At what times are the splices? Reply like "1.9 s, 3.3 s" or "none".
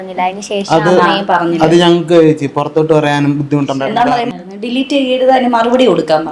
4.3 s